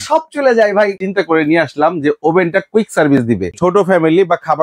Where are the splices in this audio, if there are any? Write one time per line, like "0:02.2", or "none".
0:01.0
0:03.5